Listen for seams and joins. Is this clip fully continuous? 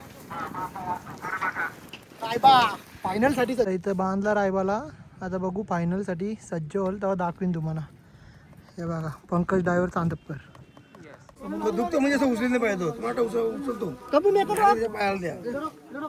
yes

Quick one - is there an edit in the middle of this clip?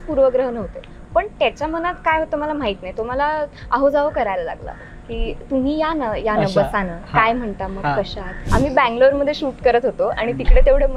yes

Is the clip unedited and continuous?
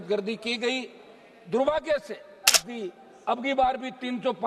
no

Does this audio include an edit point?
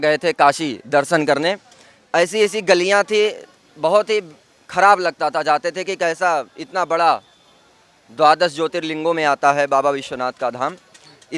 no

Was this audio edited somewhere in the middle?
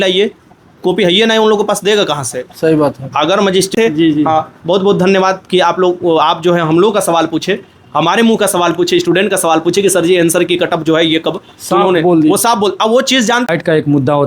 yes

